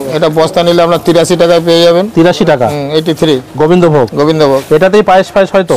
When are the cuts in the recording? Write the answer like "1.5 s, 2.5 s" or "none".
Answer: none